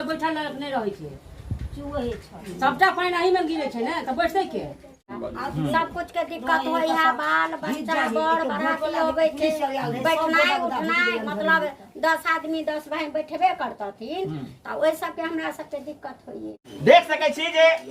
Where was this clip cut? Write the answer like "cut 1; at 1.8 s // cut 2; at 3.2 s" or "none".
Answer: cut 1; at 5.1 s // cut 2; at 16.6 s